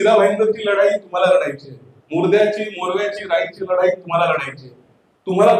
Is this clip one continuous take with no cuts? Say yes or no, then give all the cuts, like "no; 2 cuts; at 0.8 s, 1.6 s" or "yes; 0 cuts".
yes; 0 cuts